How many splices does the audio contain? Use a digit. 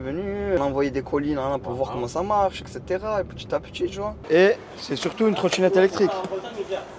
1